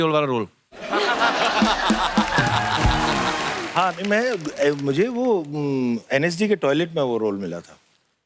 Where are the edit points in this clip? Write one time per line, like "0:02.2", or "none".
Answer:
0:03.6